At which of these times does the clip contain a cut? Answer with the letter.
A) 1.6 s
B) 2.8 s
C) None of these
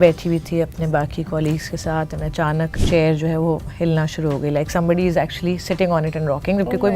B